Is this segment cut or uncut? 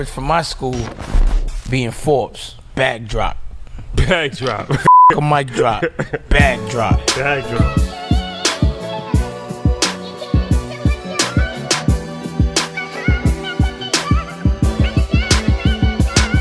uncut